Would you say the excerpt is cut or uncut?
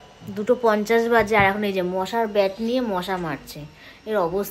cut